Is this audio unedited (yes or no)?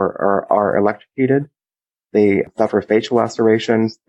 no